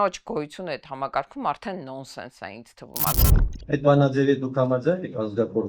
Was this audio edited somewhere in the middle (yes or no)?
yes